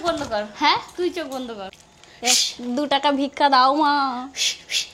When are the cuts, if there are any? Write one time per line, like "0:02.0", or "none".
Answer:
0:01.7